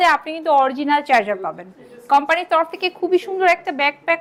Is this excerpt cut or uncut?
uncut